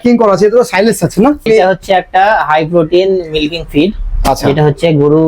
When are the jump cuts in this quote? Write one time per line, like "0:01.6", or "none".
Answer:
0:01.4